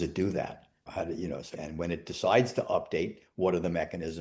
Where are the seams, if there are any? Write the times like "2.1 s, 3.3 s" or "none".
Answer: 0.9 s, 1.5 s